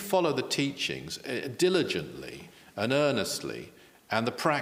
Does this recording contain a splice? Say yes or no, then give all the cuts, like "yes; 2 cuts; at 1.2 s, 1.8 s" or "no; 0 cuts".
no; 0 cuts